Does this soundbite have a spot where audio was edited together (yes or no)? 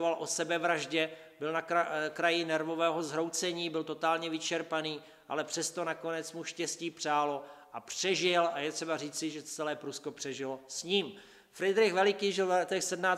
yes